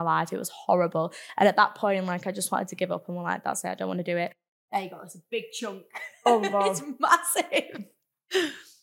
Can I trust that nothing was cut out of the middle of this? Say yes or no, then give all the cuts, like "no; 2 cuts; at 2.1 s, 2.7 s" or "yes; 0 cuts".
no; 1 cut; at 4.4 s